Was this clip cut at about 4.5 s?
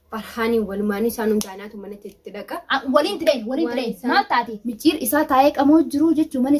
yes; 1 cut; at 4.5 s

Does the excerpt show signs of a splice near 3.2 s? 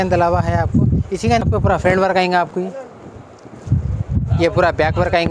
no; 1 cut; at 1.4 s

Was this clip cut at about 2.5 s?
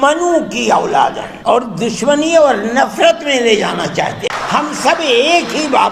no; 2 cuts; at 1.3 s, 4.3 s

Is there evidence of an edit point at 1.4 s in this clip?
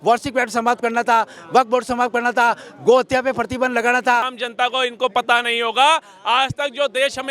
no; 1 cut; at 4.4 s

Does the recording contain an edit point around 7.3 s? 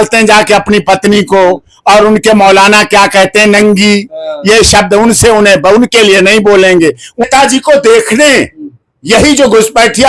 yes; 1 cut; at 7.3 s

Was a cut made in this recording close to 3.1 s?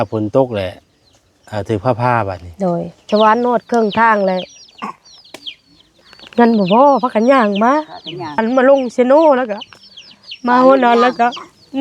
yes; 2 cuts; at 3.1 s, 8.4 s

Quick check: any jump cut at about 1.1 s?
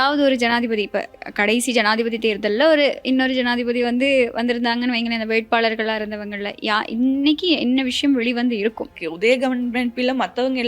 no; 1 cut; at 9.0 s

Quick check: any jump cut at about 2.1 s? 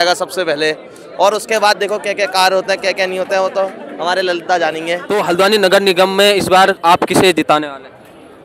no; 1 cut; at 5.0 s

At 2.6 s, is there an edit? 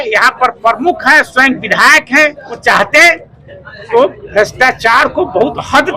yes; 1 cut; at 2.6 s

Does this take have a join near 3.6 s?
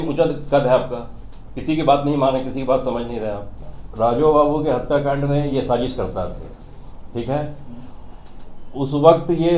yes; 1 cut; at 3.6 s

